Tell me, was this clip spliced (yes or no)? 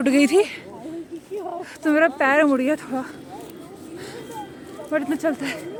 no